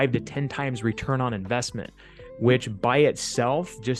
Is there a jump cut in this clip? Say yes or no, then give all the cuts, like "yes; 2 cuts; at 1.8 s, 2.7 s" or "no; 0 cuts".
no; 0 cuts